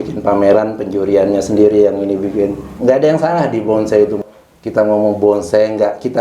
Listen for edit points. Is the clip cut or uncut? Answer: cut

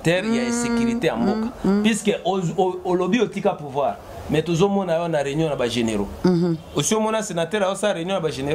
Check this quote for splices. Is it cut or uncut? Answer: uncut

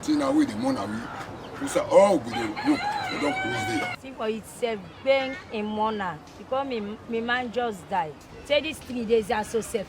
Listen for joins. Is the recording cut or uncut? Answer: cut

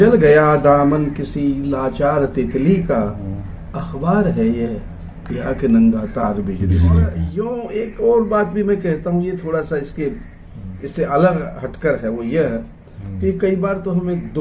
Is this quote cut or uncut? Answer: cut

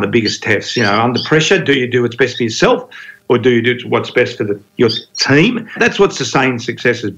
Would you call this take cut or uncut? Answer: cut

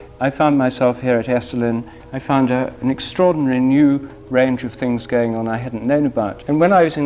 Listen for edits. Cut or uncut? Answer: uncut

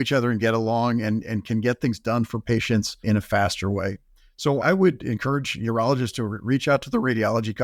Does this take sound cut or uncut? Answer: uncut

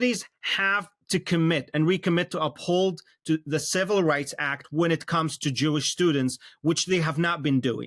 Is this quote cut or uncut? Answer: uncut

